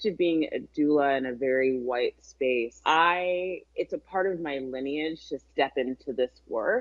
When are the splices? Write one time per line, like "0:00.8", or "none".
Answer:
0:02.7
0:03.6